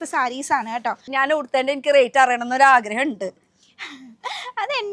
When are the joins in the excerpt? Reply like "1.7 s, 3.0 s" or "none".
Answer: 1.0 s